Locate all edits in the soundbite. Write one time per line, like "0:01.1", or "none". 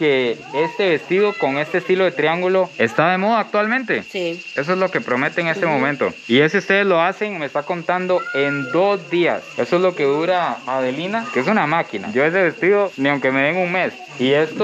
none